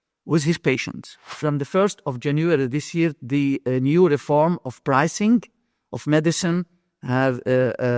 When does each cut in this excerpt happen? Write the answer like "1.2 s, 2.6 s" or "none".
1.3 s